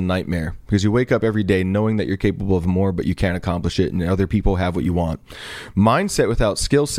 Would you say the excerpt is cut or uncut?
uncut